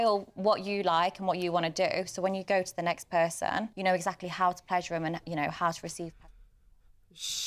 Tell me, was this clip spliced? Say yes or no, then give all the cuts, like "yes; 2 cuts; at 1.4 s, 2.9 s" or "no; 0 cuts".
no; 0 cuts